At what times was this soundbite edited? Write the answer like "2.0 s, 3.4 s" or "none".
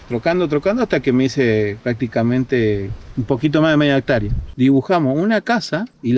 4.4 s